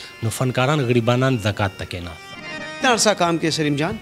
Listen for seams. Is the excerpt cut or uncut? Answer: cut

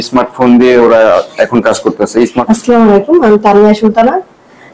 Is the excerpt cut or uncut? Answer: cut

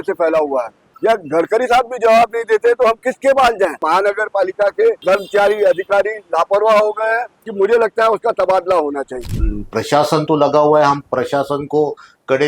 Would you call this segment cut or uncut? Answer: cut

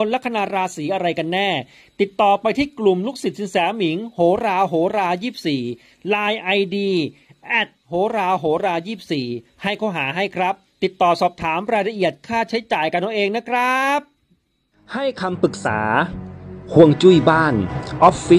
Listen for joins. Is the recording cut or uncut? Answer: cut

